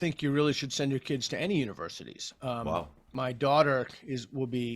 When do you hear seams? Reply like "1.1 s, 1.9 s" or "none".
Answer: 3.1 s